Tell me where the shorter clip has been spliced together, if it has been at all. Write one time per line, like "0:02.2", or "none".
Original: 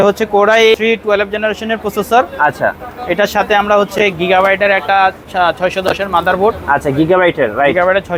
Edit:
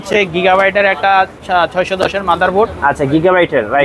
none